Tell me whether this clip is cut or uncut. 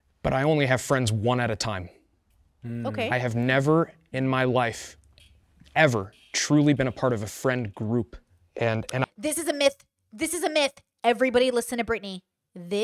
uncut